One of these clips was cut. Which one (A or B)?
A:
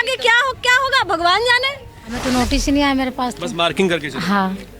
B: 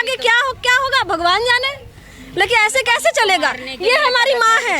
A